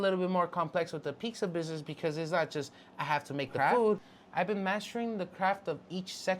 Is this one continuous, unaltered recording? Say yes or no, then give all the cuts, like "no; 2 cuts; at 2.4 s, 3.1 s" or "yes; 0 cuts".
no; 1 cut; at 4.1 s